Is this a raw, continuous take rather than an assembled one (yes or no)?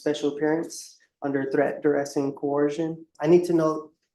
no